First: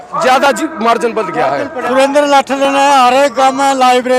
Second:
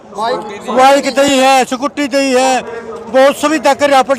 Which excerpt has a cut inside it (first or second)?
first